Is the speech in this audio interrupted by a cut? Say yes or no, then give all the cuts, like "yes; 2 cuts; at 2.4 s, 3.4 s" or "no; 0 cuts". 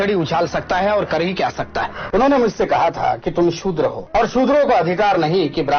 yes; 2 cuts; at 2.0 s, 4.0 s